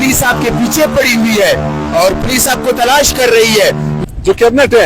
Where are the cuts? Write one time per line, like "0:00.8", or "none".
0:03.9